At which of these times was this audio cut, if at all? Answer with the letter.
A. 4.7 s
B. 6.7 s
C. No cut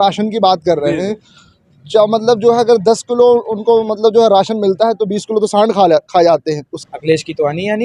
B